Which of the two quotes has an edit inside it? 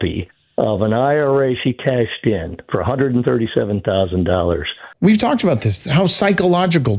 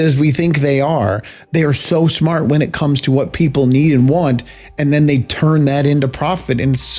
first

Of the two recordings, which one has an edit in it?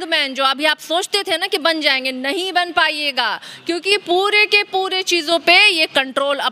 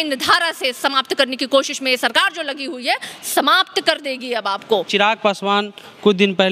second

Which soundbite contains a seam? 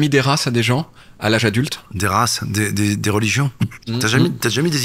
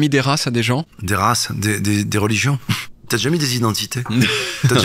second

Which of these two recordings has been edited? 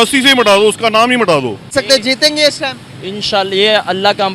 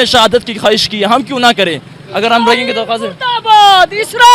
first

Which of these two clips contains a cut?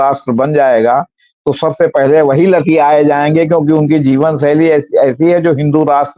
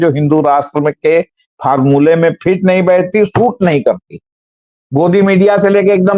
second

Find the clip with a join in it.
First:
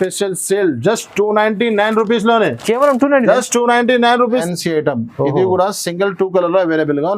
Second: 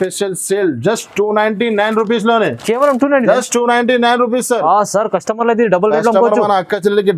first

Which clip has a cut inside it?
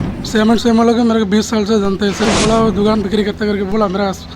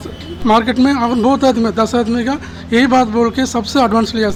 first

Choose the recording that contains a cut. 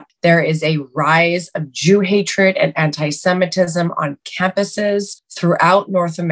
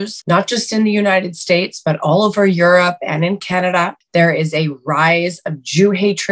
first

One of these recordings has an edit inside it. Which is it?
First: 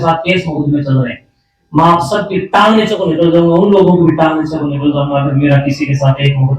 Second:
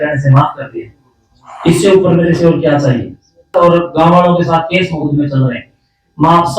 second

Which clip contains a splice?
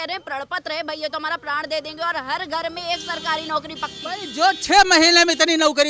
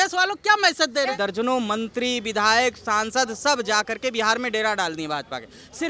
second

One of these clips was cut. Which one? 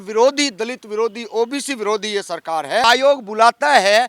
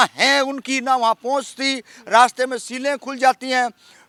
first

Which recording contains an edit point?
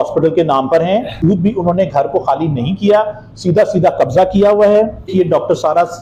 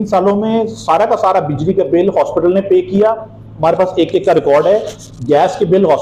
first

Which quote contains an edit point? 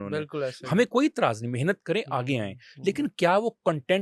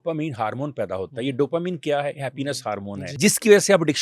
second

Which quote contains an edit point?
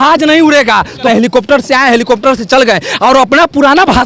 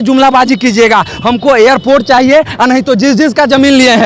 first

